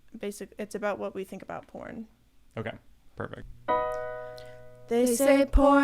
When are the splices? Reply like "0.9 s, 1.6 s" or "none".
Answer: none